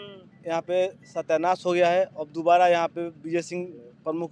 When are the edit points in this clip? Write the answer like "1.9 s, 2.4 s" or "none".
none